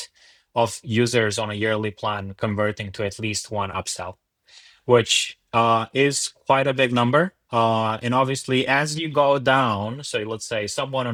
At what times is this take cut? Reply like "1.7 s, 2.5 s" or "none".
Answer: none